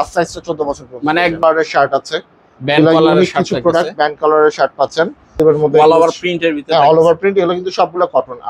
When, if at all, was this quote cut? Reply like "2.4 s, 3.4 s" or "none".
1.4 s, 5.3 s